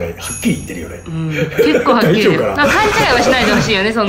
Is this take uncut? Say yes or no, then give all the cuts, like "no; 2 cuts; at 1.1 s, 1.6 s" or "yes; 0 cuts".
yes; 0 cuts